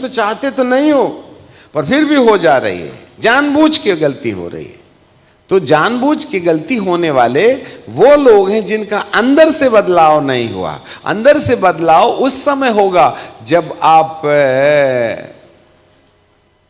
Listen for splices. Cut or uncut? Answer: uncut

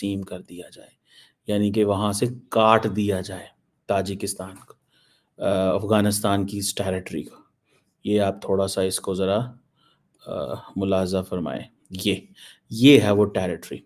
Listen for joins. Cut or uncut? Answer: uncut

